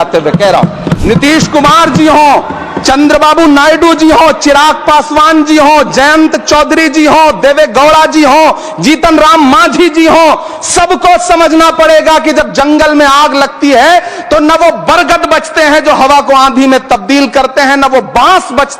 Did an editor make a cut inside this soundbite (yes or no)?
yes